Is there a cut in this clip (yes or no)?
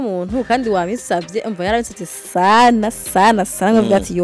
no